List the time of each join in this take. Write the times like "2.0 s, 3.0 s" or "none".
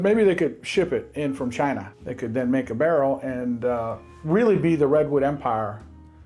2.0 s